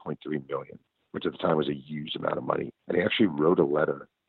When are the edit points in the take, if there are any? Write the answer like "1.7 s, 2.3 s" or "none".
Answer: 2.8 s